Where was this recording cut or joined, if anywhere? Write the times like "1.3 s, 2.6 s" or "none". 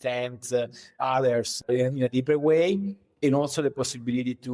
1.6 s